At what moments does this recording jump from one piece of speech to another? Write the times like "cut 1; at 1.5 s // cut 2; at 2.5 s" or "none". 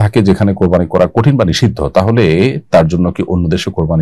none